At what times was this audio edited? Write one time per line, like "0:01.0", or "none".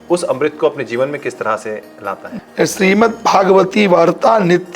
0:02.3